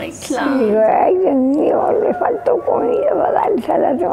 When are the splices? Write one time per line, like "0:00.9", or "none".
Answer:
none